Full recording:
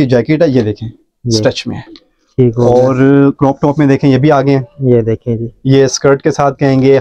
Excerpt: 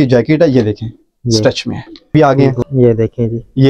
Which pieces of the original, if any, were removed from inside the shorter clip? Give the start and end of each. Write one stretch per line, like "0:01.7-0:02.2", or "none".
0:02.1-0:04.2

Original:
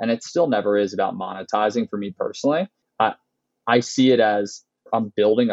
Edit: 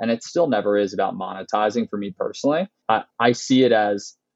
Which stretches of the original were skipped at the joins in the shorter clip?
0:02.8-0:03.3

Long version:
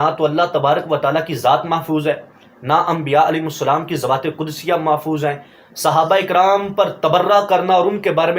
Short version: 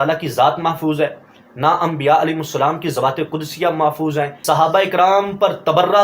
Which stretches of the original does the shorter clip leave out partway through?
0:05.4-0:05.7

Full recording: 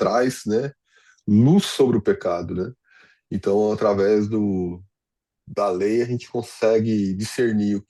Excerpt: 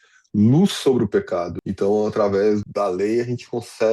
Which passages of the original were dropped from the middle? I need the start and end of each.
0:02.5-0:03.2
0:04.3-0:05.4

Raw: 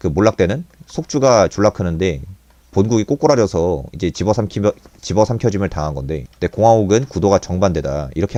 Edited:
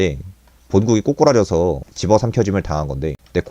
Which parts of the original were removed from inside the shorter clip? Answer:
0:03.9-0:04.9

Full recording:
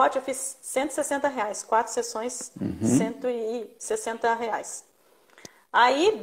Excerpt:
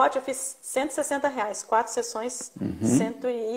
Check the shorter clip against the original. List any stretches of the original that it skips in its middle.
none

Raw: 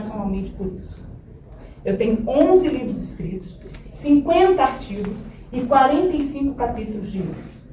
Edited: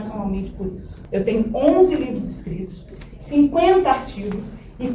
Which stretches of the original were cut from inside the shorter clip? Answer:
0:00.9-0:01.6

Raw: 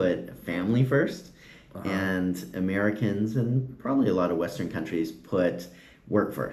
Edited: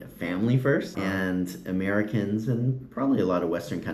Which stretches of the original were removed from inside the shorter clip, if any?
0:01.2-0:01.8

